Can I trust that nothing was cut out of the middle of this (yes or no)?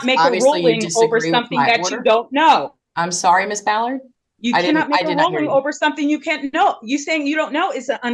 yes